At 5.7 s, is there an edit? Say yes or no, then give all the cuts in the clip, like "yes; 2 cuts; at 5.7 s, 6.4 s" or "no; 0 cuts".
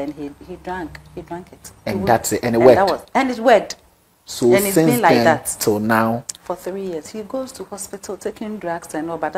no; 1 cut; at 7.2 s